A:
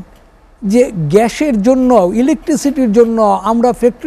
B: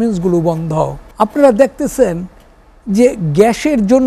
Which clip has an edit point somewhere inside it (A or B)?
B